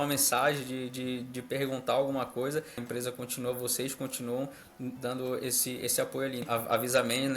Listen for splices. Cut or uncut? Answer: cut